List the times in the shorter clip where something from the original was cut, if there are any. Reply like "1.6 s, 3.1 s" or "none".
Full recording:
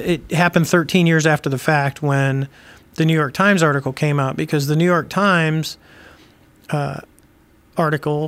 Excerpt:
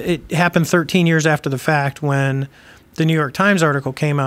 none